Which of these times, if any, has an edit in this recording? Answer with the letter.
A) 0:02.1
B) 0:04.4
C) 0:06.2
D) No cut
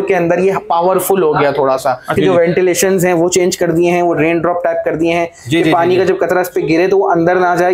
A